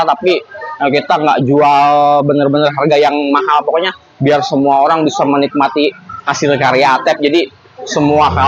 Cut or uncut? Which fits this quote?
uncut